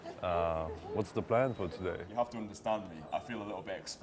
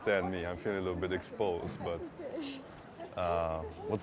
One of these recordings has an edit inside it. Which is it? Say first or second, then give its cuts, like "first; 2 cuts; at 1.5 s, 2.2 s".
first; 2 cuts; at 2.1 s, 3.0 s